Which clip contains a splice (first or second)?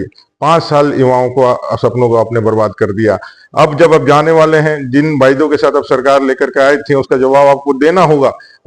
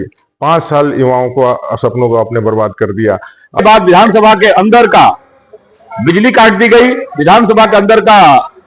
second